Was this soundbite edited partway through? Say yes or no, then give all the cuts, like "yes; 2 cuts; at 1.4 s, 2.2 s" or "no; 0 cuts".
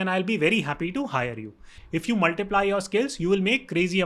yes; 1 cut; at 1.6 s